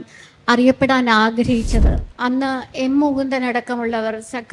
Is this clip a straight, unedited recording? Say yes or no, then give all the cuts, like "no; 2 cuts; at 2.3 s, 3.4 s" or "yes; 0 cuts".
no; 1 cut; at 2.0 s